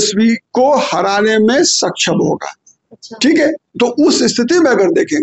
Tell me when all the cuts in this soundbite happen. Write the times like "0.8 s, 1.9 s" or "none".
none